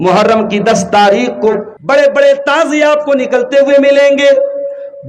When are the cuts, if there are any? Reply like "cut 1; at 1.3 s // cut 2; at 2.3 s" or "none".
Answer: cut 1; at 1.7 s